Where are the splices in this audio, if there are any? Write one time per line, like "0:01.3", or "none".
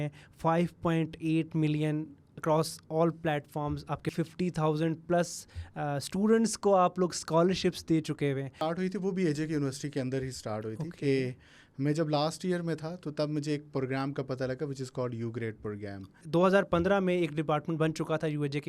0:04.1
0:08.5
0:16.2